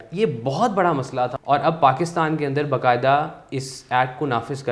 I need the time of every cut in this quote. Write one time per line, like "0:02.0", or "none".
0:01.3